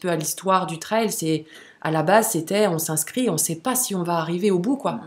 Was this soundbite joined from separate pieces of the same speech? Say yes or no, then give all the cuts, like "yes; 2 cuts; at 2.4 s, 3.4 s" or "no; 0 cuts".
no; 0 cuts